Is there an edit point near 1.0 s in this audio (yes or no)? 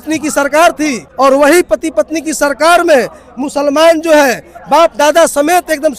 yes